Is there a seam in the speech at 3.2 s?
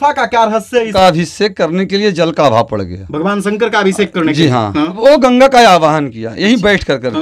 no; 2 cuts; at 0.9 s, 5.0 s

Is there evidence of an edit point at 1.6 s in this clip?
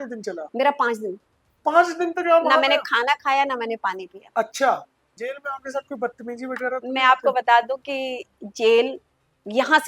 no; 1 cut; at 5.2 s

